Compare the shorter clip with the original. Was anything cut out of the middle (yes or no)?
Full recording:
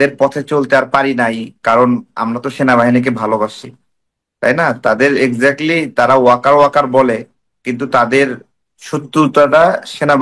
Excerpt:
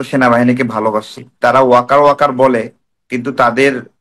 yes